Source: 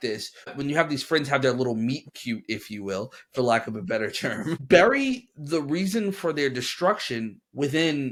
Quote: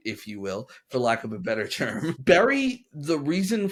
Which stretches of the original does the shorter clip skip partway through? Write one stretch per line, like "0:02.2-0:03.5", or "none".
none

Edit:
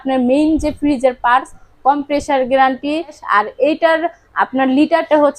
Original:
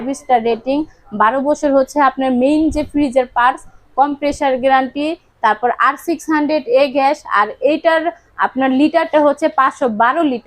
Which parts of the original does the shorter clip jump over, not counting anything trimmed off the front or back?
0:05.3-0:07.2

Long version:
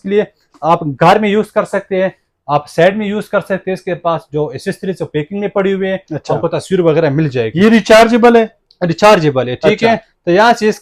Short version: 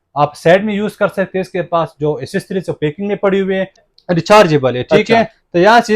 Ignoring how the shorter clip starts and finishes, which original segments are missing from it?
0:06.2-0:08.6

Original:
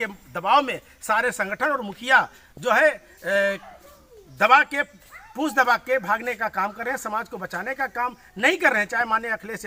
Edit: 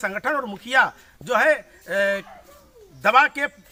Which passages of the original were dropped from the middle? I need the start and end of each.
none

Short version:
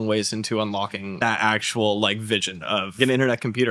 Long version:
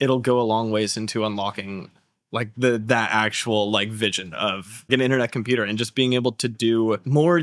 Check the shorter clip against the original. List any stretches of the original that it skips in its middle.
0:01.9-0:02.9
0:04.6-0:04.8

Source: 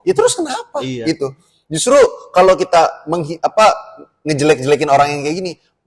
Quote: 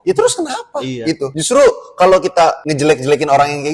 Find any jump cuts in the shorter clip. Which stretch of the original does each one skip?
0:01.4-0:01.7
0:03.0-0:04.2

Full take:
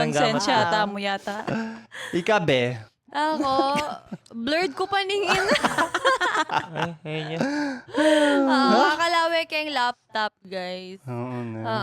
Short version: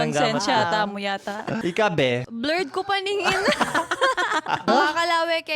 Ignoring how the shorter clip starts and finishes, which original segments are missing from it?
0:01.6-0:02.1
0:02.8-0:04.3
0:06.7-0:08.7

